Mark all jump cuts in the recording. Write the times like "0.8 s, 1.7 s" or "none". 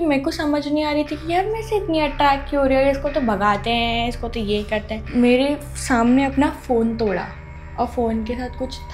5.0 s